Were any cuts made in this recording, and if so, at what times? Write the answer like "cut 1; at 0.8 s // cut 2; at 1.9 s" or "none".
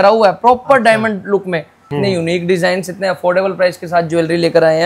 cut 1; at 1.9 s

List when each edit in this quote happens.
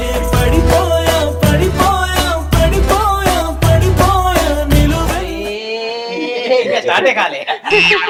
none

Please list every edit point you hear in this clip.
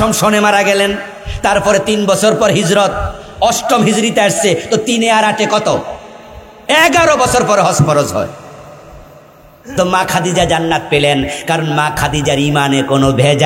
none

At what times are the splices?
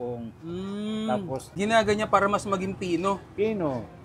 cut 1; at 1.5 s

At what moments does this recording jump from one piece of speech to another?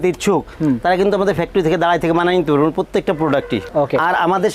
cut 1; at 3.6 s

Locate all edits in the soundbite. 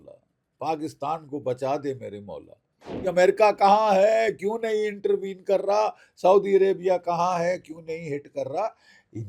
cut 1; at 3.0 s

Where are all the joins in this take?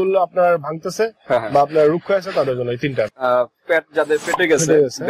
cut 1; at 3.1 s

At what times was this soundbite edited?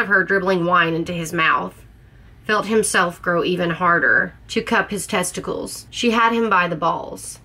cut 1; at 4.3 s // cut 2; at 5.8 s

